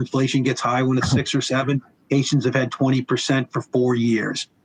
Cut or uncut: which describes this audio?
uncut